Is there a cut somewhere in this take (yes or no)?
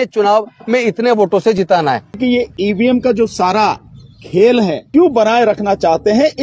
yes